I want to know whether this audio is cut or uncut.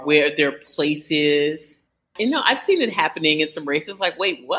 cut